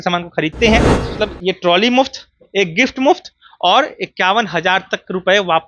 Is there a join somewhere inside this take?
yes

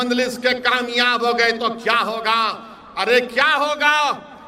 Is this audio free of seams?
yes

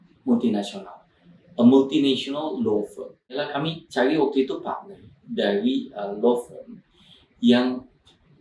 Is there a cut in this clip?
yes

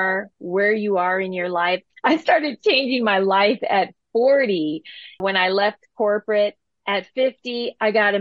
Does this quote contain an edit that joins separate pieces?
yes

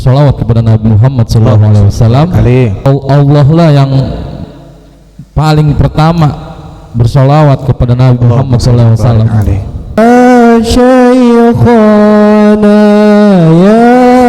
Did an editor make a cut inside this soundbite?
yes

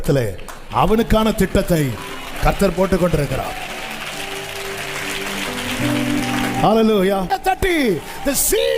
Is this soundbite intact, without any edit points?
no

